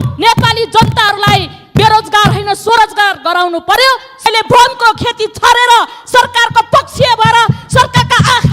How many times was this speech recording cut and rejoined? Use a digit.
1